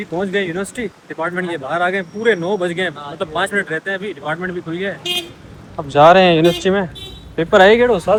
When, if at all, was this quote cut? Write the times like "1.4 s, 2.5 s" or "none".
none